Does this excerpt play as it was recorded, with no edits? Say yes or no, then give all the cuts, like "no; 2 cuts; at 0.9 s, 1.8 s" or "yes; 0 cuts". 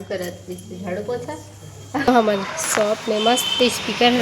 no; 1 cut; at 2.1 s